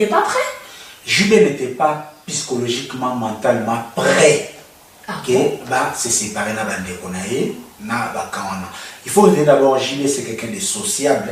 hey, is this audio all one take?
yes; 0 cuts

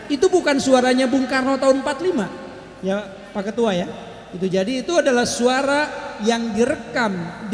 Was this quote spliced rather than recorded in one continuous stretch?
no; 0 cuts

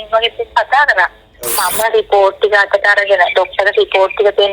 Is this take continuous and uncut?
no; 1 cut; at 1.5 s

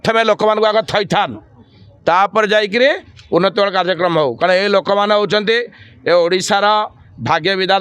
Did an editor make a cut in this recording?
no; 0 cuts

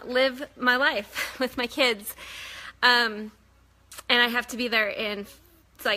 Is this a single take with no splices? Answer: no; 1 cut; at 4.0 s

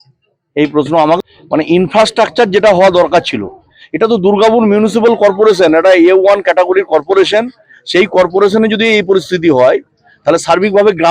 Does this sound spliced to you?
yes; 1 cut; at 1.2 s

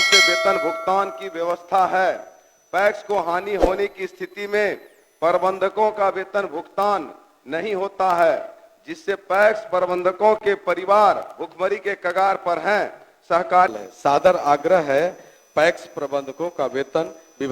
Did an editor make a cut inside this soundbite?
yes; 1 cut; at 13.7 s

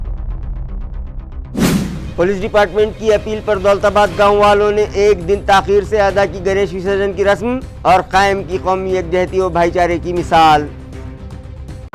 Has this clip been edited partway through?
no; 0 cuts

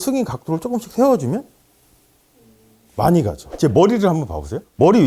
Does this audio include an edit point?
yes; 1 cut; at 3.5 s

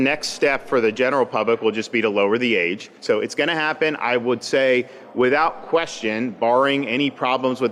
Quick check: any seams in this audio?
yes; 1 cut; at 2.9 s

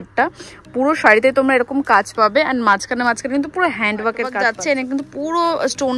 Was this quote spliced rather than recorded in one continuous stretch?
yes; 1 cut; at 4.3 s

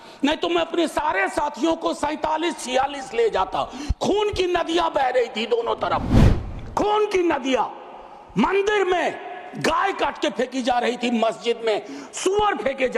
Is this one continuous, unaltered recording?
yes; 0 cuts

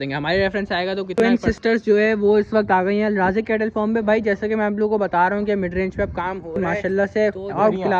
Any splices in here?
yes; 2 cuts; at 1.1 s, 6.6 s

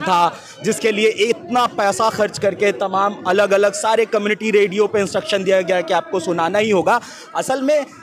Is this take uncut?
yes; 0 cuts

